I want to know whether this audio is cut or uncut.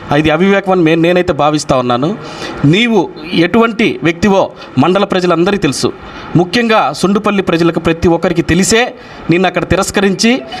uncut